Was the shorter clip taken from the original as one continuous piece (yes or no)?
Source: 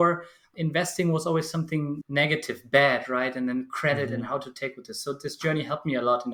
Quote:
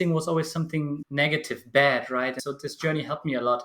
no